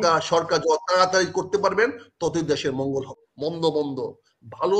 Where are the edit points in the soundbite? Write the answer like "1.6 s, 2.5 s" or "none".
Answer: 3.2 s